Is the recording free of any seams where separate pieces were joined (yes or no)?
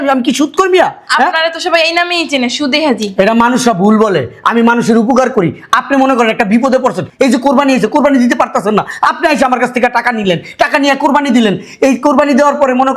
yes